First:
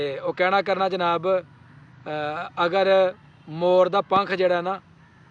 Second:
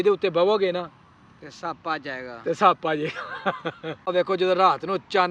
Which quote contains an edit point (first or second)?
second